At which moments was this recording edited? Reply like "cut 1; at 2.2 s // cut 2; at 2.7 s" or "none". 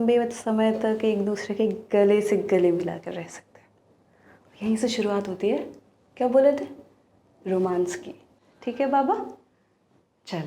cut 1; at 8.6 s